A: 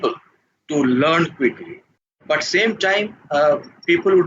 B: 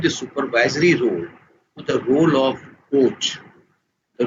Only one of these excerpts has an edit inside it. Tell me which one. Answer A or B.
A